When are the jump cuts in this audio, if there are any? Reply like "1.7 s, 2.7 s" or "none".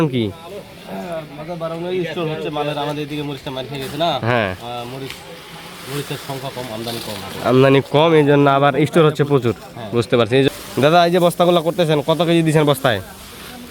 10.5 s